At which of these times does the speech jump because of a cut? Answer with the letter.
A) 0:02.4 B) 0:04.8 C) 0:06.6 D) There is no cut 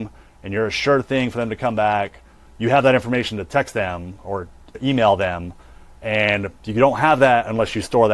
B